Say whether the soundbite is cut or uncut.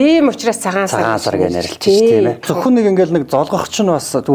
cut